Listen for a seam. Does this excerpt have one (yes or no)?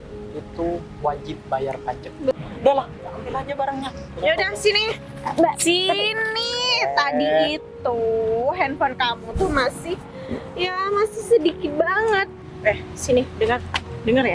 yes